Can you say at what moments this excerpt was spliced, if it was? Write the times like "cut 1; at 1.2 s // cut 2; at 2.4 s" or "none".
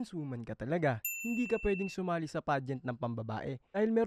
none

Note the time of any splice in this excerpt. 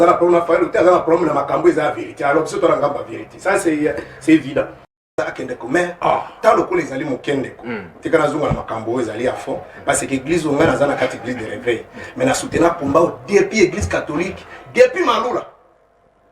cut 1; at 5.1 s

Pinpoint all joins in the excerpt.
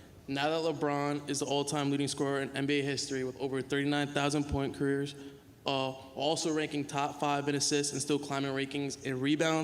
none

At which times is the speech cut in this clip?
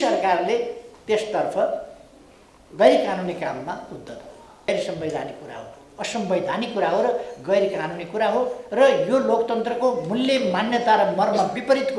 cut 1; at 4.7 s

